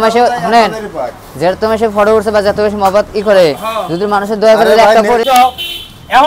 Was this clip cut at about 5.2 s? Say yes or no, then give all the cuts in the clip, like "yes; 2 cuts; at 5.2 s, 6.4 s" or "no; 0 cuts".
yes; 1 cut; at 5.2 s